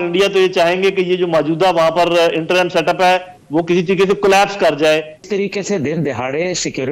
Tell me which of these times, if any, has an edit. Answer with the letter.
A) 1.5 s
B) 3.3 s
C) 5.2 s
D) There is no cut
C